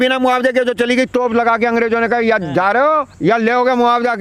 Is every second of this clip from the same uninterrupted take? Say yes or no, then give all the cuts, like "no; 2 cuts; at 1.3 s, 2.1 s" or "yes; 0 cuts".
no; 1 cut; at 3.1 s